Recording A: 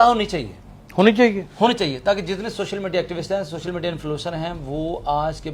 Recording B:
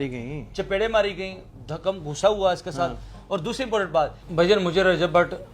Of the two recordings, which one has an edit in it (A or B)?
B